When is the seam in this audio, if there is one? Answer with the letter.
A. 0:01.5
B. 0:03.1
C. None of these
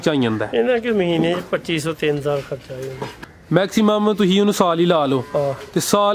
B